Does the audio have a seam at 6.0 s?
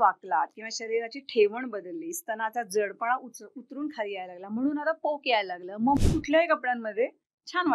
yes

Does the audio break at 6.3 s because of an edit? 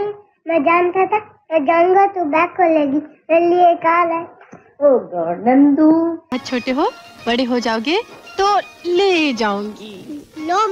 yes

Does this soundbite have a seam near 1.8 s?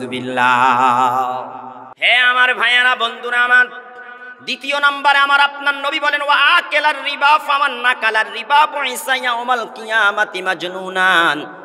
yes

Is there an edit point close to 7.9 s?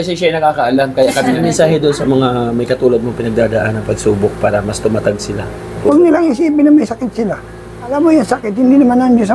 yes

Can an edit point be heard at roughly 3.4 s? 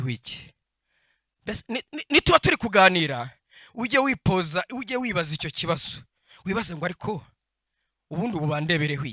no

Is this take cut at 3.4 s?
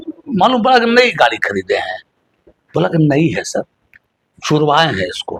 no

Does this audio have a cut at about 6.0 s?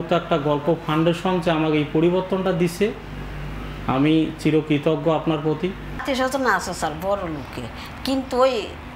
yes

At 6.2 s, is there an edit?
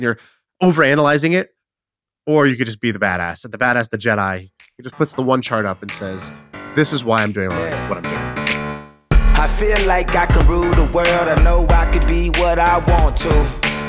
no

